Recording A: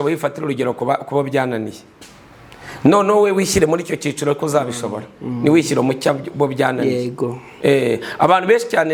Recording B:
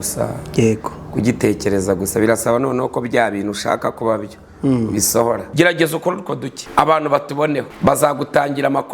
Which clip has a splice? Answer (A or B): B